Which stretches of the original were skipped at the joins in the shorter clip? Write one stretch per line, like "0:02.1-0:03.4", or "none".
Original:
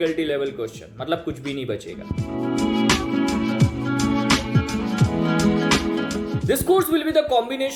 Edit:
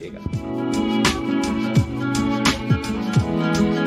none